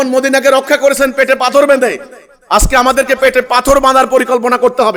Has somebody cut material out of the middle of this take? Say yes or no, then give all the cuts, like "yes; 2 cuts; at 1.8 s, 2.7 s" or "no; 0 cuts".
no; 0 cuts